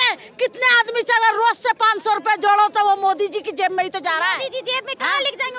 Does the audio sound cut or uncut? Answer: uncut